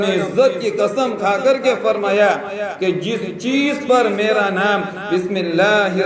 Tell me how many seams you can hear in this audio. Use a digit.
0